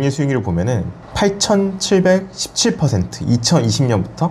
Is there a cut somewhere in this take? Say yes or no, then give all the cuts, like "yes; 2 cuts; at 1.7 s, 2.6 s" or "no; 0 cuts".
no; 0 cuts